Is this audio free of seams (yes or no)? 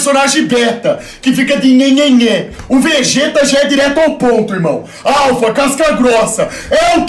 yes